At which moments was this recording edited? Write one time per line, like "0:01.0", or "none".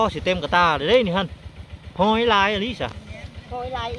none